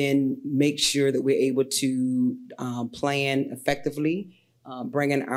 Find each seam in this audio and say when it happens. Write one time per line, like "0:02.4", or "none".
none